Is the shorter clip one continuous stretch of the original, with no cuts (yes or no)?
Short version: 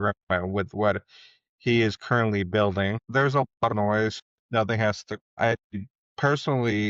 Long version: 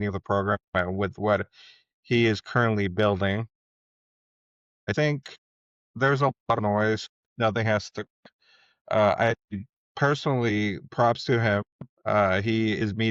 no